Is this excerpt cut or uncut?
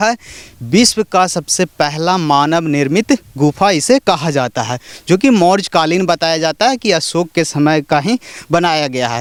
uncut